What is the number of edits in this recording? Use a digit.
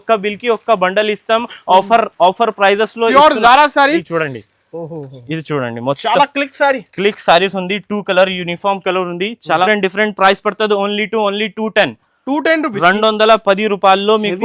2